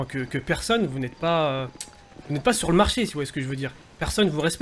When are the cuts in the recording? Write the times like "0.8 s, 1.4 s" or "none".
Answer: none